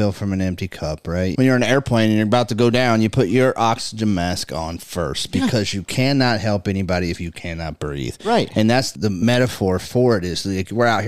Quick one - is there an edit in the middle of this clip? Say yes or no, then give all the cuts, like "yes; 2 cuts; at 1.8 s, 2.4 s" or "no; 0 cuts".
yes; 2 cuts; at 1.3 s, 9.1 s